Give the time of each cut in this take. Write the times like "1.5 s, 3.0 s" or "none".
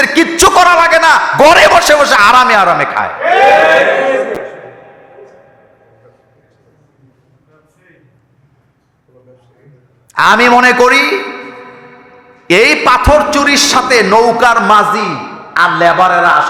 none